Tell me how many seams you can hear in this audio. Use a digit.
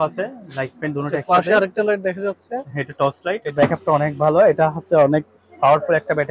1